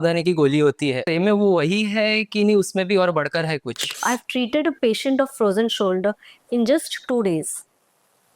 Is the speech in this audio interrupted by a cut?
yes; 2 cuts; at 1.0 s, 4.0 s

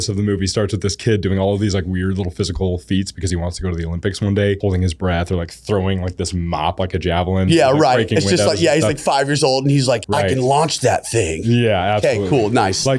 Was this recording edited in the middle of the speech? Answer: yes; 2 cuts; at 4.6 s, 10.0 s

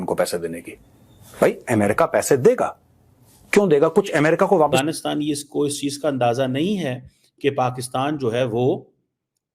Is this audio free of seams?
no; 1 cut; at 4.8 s

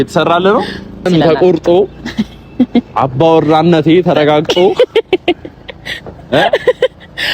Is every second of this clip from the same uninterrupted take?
no; 1 cut; at 1.1 s

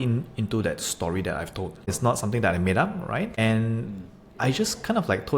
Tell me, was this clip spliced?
yes; 2 cuts; at 2.0 s, 3.3 s

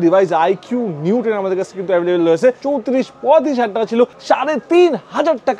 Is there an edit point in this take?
yes; 2 cuts; at 2.6 s, 4.2 s

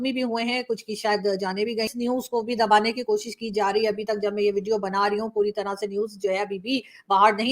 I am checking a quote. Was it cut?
yes; 1 cut; at 1.9 s

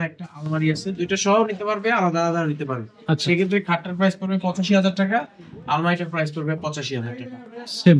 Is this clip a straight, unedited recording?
yes; 0 cuts

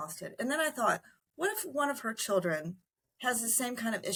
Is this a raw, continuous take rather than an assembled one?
yes; 0 cuts

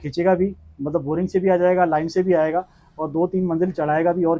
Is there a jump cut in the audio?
no; 0 cuts

